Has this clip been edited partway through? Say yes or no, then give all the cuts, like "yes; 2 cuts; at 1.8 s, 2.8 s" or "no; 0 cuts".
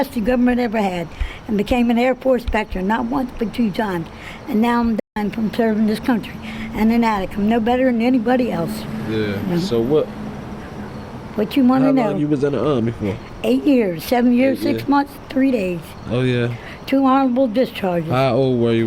no; 0 cuts